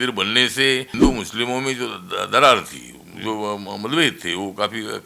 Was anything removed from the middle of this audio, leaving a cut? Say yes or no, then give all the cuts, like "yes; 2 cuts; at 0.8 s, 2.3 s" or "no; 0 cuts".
yes; 1 cut; at 0.9 s